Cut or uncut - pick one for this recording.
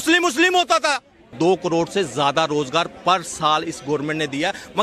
cut